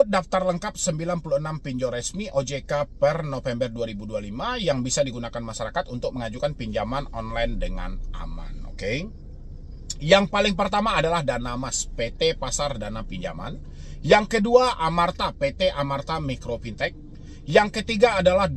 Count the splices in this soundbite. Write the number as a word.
zero